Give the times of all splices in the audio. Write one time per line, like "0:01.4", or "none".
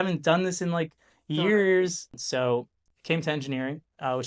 0:02.2